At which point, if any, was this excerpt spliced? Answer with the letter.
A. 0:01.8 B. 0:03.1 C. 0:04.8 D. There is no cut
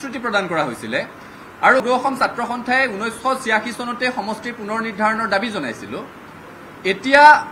A